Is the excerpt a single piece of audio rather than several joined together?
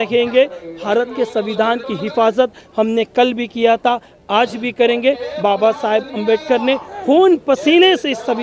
yes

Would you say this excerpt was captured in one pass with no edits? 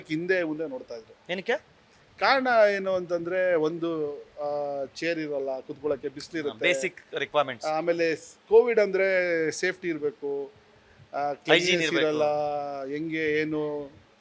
yes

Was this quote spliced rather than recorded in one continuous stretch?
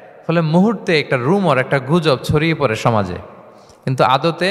no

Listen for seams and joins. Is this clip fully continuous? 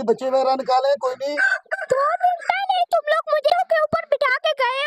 no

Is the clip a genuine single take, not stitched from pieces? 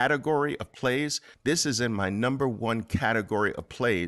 no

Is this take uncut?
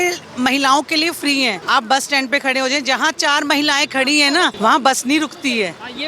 no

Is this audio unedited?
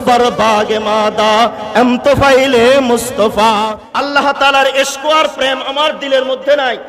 no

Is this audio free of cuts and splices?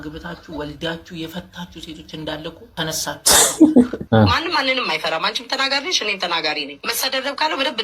no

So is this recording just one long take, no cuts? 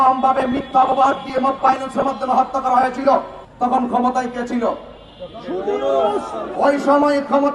no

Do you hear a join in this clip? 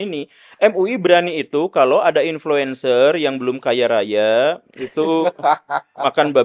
no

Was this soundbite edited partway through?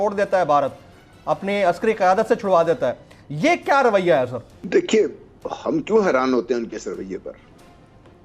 no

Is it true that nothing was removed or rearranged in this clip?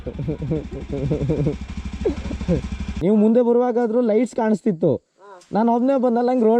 no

